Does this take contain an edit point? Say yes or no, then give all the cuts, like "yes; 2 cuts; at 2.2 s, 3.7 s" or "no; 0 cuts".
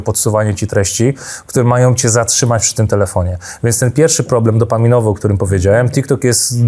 no; 0 cuts